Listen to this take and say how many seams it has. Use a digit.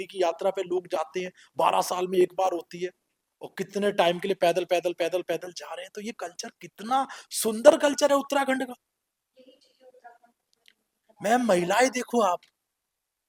0